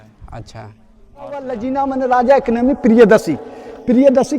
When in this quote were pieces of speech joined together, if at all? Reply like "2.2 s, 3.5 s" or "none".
1.5 s